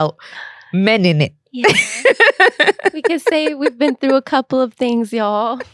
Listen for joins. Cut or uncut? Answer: uncut